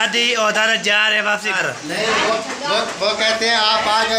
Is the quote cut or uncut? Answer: cut